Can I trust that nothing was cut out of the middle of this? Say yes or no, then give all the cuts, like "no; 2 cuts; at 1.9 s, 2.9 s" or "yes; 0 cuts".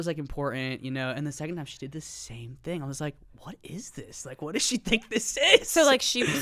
yes; 0 cuts